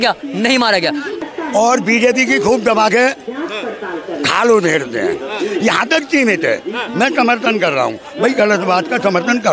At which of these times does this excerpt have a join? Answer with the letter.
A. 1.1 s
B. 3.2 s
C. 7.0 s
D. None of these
A